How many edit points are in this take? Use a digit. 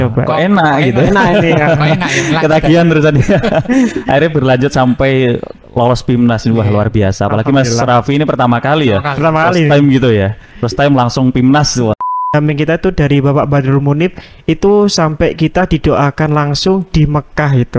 1